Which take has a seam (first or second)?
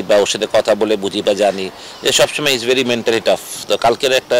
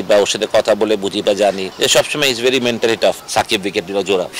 second